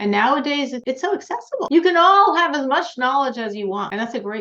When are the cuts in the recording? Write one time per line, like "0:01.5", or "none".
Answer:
0:01.7